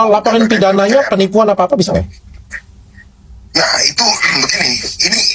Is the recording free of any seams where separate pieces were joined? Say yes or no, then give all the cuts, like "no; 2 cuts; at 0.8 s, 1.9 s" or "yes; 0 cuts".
yes; 0 cuts